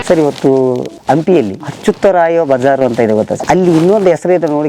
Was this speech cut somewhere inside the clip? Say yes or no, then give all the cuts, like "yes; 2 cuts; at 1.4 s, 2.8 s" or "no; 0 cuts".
yes; 2 cuts; at 0.9 s, 3.4 s